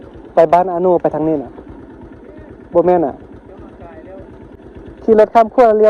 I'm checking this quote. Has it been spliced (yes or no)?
yes